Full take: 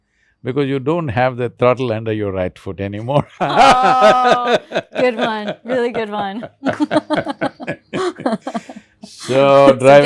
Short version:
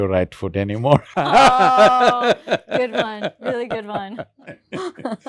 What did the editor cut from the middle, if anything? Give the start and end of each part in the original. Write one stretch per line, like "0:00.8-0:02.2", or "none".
0:06.6-0:07.5